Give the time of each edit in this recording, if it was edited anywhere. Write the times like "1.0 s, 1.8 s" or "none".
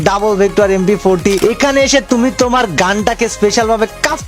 1.4 s